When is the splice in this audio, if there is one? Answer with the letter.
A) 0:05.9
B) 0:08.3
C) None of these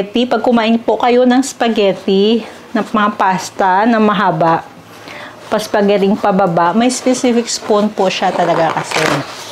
C